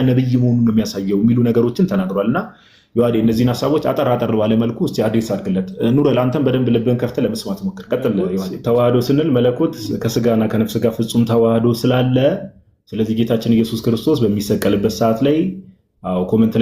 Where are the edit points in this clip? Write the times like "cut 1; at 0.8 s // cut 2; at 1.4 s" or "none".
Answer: cut 1; at 8.5 s